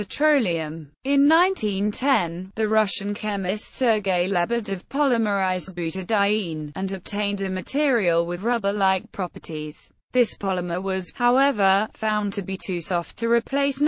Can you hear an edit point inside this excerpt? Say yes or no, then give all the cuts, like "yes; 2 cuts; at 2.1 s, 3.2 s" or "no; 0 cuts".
no; 0 cuts